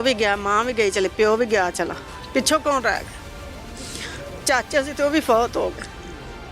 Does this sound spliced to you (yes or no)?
no